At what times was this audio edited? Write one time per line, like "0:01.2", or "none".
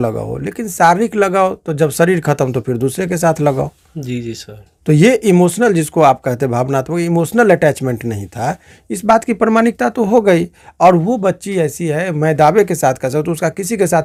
none